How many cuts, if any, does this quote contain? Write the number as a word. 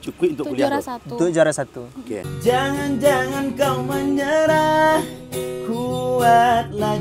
one